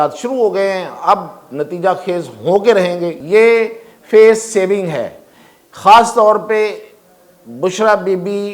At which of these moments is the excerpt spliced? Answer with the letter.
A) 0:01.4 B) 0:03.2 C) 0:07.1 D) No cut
B